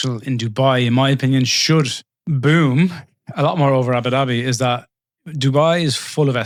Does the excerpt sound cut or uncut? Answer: uncut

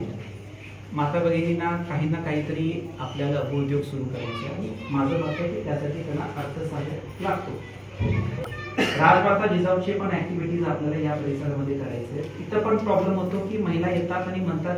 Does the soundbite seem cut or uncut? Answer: uncut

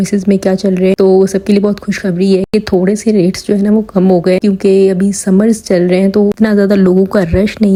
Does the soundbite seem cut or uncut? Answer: uncut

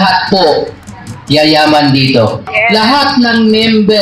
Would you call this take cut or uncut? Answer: cut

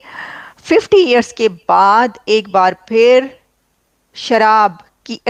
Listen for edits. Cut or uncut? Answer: uncut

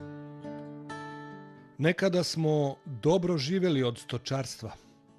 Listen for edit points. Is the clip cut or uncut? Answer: cut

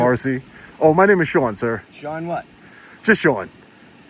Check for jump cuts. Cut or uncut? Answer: uncut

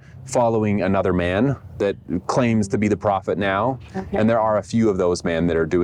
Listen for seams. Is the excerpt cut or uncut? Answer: uncut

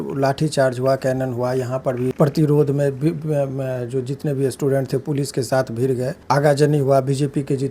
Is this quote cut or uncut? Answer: cut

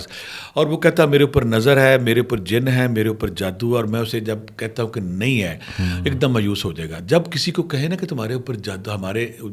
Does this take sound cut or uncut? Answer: uncut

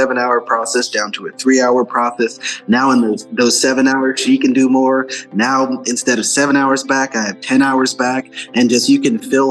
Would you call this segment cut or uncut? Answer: uncut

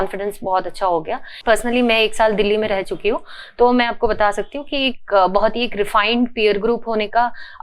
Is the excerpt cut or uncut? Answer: cut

